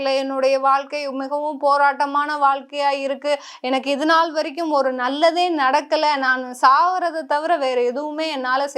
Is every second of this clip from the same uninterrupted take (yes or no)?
yes